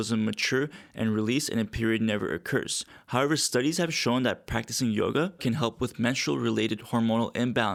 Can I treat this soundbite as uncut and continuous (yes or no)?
yes